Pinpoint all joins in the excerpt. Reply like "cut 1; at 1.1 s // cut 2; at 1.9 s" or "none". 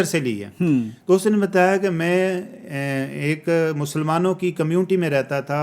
none